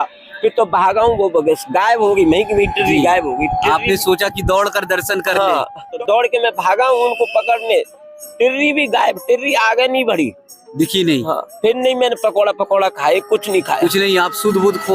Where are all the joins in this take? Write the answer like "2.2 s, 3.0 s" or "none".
5.9 s